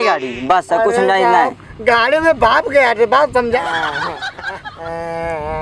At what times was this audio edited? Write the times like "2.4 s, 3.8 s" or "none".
3.6 s